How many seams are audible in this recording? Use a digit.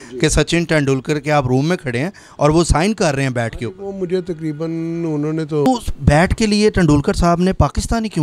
1